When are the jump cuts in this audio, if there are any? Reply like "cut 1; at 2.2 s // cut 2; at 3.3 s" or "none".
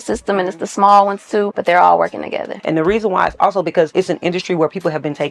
cut 1; at 1.5 s // cut 2; at 2.5 s // cut 3; at 3.9 s